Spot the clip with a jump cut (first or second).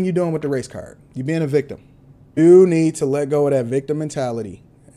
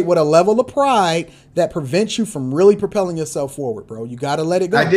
first